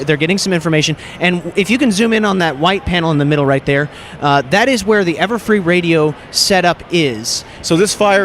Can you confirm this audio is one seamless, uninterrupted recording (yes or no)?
no